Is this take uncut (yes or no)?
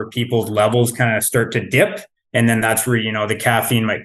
yes